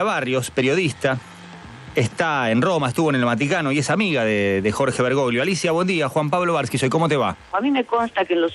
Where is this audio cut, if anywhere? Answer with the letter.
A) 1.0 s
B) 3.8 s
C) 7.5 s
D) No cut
C